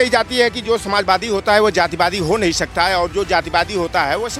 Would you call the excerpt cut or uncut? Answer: uncut